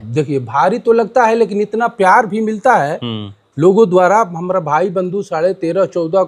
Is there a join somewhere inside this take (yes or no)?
no